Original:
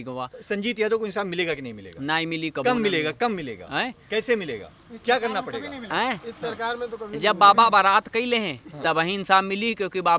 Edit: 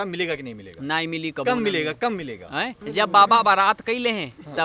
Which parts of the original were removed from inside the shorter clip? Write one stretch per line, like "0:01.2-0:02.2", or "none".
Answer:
0:04.0-0:07.1